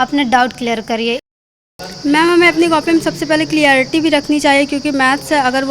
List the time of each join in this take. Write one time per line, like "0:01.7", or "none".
0:01.3